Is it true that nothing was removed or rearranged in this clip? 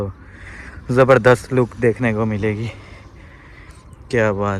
yes; 0 cuts

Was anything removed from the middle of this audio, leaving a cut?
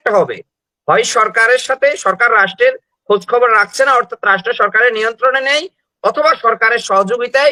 no; 0 cuts

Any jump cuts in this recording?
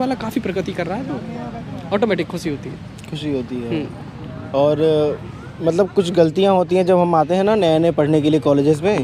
no; 0 cuts

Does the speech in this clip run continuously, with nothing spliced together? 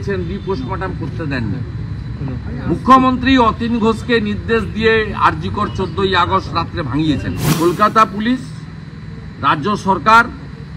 no; 1 cut; at 7.4 s

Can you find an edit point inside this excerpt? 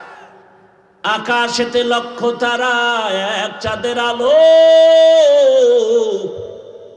no; 0 cuts

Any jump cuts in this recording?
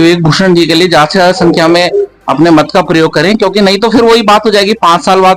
no; 0 cuts

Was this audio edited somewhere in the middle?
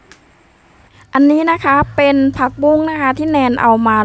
yes; 1 cut; at 1.0 s

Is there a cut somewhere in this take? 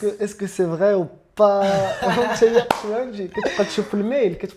no; 0 cuts

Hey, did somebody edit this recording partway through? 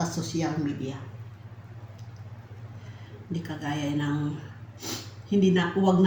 no; 0 cuts

